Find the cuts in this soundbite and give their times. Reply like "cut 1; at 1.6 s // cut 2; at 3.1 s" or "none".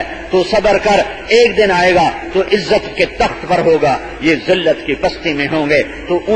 cut 1; at 2.4 s